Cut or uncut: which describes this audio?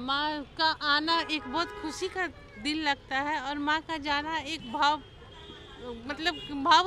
uncut